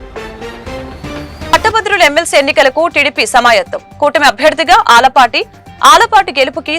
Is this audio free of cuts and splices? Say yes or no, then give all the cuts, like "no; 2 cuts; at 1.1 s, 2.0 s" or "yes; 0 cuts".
no; 1 cut; at 1.5 s